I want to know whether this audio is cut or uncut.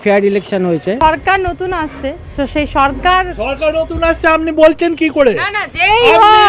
cut